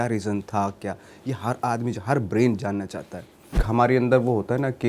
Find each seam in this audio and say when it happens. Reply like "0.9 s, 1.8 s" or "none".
3.6 s

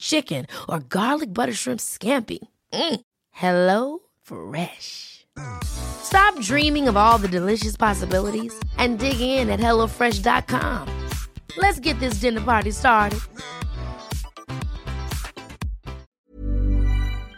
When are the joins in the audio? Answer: 16.1 s

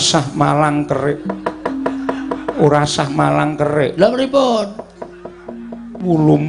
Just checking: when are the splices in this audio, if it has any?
none

